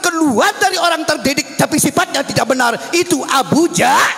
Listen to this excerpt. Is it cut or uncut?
uncut